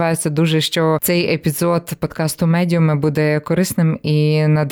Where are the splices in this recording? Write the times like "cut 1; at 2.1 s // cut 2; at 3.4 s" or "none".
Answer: cut 1; at 1.0 s